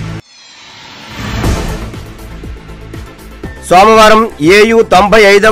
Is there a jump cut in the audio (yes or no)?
yes